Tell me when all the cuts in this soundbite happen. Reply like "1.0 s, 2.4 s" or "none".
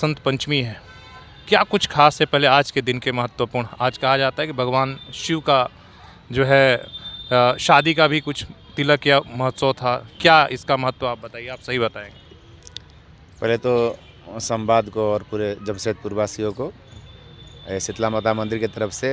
none